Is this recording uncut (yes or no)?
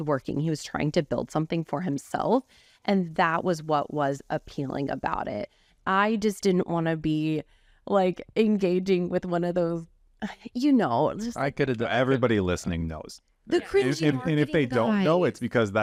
yes